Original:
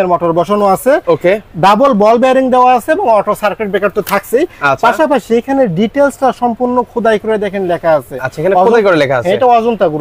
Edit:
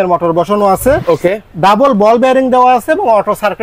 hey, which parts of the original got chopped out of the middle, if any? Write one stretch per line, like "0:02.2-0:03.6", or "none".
none